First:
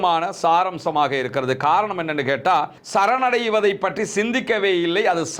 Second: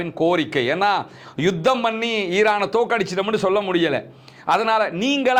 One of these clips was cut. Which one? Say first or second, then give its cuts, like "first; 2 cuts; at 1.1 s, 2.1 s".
first; 1 cut; at 2.8 s